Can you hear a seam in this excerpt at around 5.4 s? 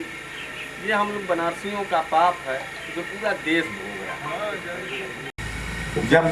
yes; 1 cut; at 5.4 s

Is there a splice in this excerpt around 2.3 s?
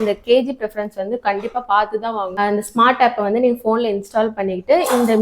yes; 1 cut; at 2.3 s

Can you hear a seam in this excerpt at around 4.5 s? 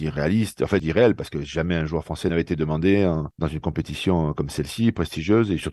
no; 1 cut; at 2.3 s

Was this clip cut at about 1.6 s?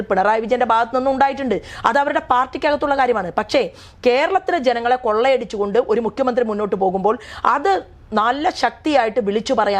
no; 0 cuts

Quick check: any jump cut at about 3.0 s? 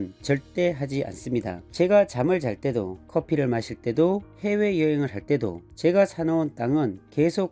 no; 0 cuts

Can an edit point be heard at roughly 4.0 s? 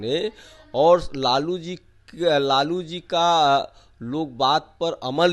no; 0 cuts

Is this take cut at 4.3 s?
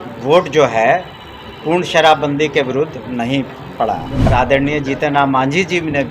yes; 1 cut; at 4.3 s

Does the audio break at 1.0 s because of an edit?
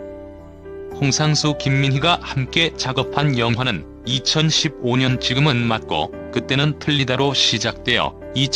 yes; 2 cuts; at 1.0 s, 2.0 s

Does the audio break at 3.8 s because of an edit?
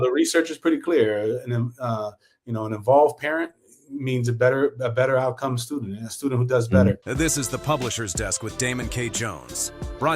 no; 1 cut; at 7.0 s

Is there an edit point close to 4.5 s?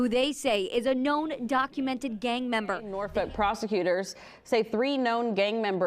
no; 1 cut; at 3.0 s

